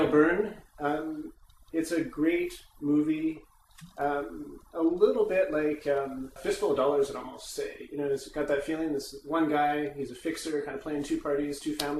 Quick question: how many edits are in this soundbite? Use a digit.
0